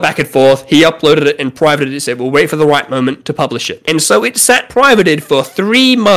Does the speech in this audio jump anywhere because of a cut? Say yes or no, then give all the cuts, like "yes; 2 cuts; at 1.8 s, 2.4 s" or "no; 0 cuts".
no; 0 cuts